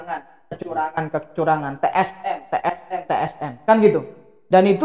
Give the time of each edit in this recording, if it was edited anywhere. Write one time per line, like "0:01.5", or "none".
none